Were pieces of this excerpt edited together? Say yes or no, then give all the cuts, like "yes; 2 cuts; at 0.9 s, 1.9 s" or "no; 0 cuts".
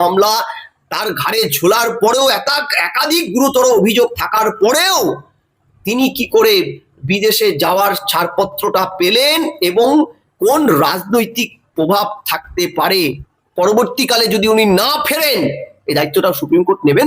yes; 1 cut; at 13.0 s